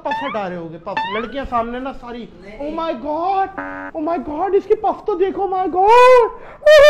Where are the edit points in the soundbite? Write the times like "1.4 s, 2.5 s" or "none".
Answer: none